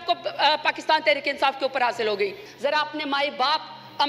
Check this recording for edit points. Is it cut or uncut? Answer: cut